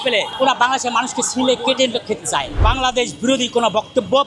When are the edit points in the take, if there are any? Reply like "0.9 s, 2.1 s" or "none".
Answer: 2.6 s